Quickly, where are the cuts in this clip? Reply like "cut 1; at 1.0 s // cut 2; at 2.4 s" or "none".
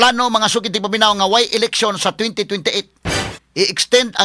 cut 1; at 3.3 s